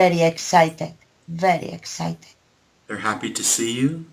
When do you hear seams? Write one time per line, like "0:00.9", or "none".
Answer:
0:01.8